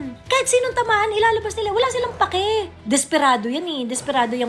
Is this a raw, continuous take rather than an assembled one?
yes; 0 cuts

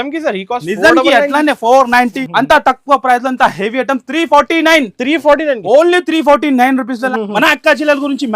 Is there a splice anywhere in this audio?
yes; 2 cuts; at 2.2 s, 7.1 s

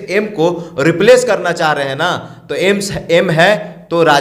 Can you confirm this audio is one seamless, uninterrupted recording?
yes; 0 cuts

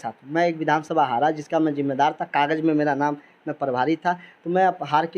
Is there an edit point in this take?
no; 0 cuts

